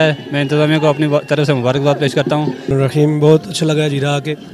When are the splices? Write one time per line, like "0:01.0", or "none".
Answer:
0:02.7